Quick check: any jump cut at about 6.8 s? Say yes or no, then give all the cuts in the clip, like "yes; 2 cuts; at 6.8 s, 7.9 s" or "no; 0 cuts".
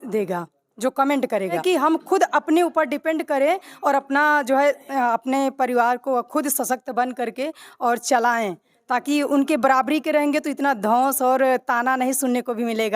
no; 1 cut; at 1.6 s